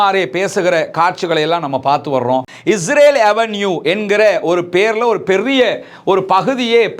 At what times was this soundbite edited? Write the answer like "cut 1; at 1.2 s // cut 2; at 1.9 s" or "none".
cut 1; at 2.4 s